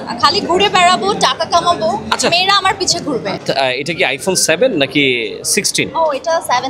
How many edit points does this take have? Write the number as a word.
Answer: one